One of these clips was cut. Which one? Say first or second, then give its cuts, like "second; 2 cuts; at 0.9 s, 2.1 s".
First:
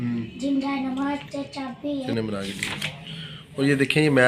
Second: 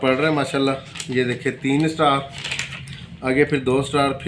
first; 1 cut; at 2.1 s